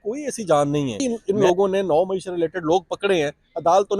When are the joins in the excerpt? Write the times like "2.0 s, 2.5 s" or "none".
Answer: 1.0 s